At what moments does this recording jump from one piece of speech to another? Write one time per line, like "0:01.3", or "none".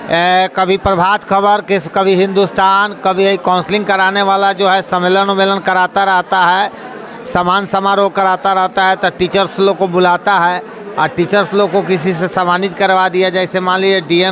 none